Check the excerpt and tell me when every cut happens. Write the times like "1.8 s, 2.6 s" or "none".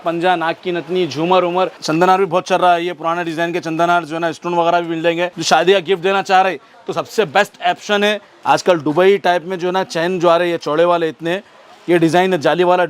1.8 s, 5.4 s, 8.3 s